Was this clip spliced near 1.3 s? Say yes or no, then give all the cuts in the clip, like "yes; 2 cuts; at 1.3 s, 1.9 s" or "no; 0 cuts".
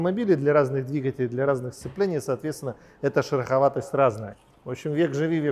no; 1 cut; at 4.3 s